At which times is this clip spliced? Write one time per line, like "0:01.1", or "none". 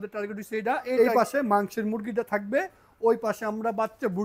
0:01.0